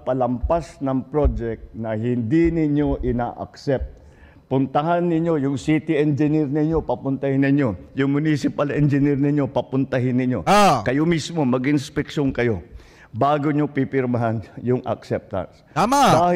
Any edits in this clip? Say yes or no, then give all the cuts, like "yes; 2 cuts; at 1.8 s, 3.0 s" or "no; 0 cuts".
no; 0 cuts